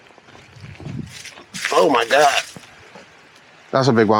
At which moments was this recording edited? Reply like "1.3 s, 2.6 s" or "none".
none

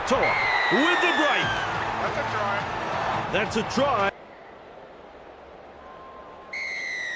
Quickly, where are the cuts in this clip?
4.1 s

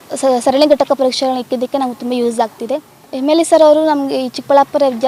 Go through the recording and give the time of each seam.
3.0 s

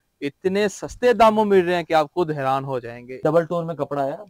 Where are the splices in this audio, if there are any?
3.2 s

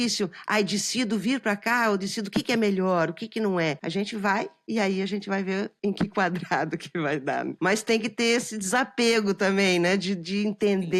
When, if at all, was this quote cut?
3.8 s, 7.5 s

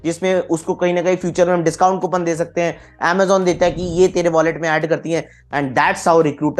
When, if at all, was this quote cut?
5.4 s

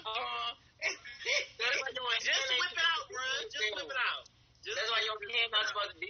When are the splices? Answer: none

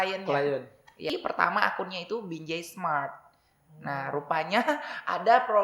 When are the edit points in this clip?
1.1 s

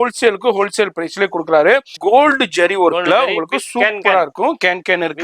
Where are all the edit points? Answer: 1.9 s

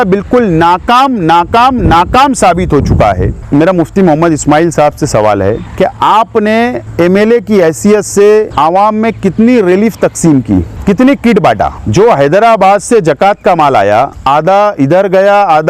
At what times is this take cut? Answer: 3.3 s, 5.7 s, 6.8 s, 8.5 s, 10.7 s, 11.8 s, 14.2 s

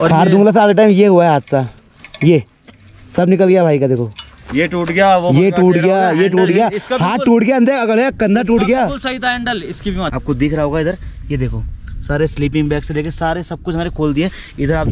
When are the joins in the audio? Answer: 10.1 s

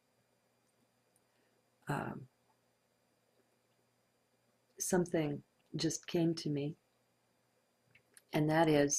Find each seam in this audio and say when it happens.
6.5 s

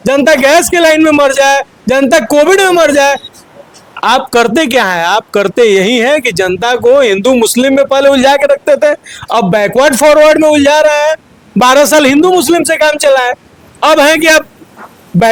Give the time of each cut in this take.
none

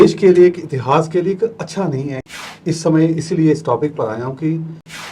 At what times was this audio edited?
2.2 s

